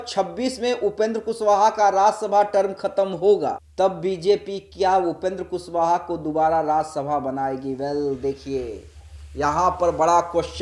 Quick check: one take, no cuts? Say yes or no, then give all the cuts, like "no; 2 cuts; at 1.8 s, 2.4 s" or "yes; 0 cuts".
yes; 0 cuts